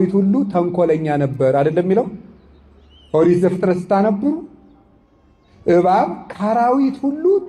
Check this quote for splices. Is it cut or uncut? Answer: uncut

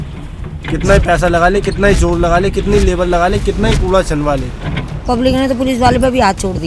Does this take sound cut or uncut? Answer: cut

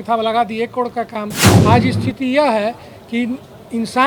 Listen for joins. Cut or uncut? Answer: cut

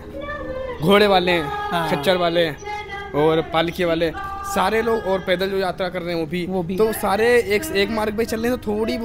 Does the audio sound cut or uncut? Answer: uncut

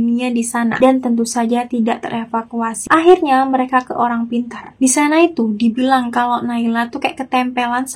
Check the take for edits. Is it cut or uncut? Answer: cut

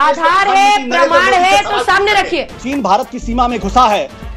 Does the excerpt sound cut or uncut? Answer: cut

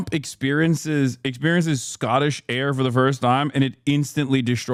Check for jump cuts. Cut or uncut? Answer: uncut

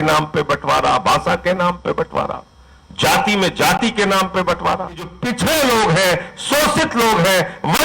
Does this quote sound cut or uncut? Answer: cut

